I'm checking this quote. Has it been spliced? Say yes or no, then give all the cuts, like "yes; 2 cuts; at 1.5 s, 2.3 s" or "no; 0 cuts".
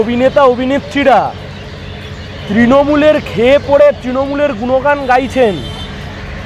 no; 0 cuts